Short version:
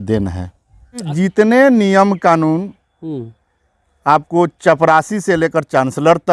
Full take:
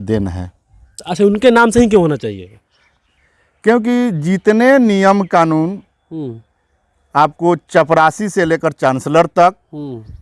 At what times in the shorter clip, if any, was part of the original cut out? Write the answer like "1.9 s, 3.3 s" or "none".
1.1 s